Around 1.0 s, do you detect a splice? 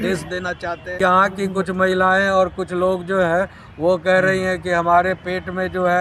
yes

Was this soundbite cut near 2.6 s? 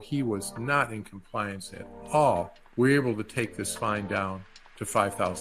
yes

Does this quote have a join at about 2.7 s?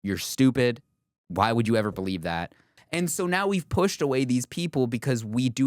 yes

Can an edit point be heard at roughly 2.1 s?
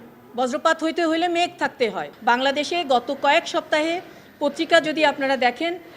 yes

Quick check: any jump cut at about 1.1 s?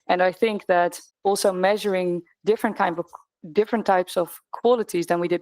yes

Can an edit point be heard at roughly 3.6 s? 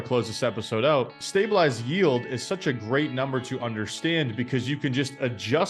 no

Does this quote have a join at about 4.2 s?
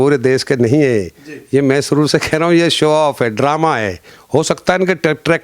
yes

